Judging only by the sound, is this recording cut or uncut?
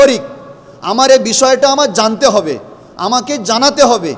uncut